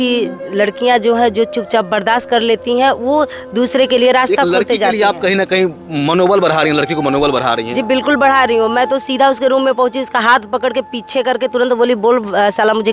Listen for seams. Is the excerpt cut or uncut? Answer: uncut